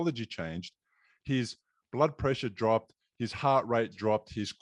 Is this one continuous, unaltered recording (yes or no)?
yes